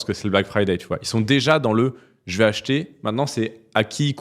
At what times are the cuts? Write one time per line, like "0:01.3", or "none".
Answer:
none